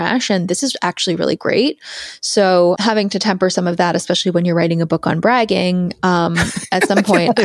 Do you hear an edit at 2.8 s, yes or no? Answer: yes